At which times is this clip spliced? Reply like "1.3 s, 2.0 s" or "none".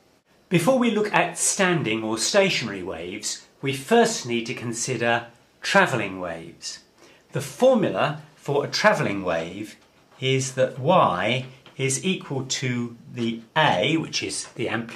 none